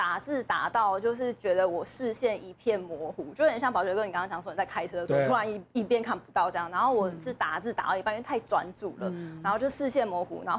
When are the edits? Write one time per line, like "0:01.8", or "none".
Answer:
none